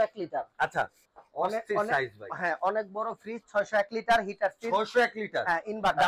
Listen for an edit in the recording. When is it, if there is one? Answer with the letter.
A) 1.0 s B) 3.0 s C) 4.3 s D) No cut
A